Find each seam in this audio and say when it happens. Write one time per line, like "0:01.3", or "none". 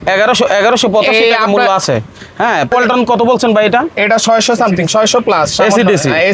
0:02.7